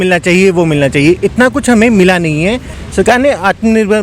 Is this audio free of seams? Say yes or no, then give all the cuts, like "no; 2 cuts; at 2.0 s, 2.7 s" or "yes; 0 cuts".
no; 1 cut; at 2.7 s